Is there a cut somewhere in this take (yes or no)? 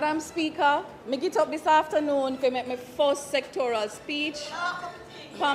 yes